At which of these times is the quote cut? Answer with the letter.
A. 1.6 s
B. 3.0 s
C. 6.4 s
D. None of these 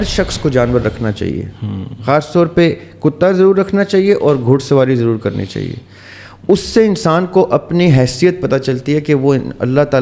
D